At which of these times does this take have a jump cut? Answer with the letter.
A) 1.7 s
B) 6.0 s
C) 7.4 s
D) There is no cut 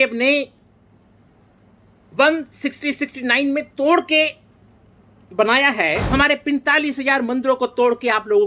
B